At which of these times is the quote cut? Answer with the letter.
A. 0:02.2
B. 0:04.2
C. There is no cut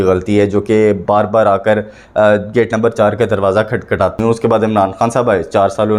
B